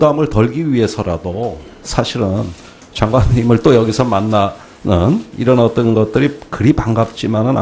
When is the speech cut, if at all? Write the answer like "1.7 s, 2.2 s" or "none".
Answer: 2.1 s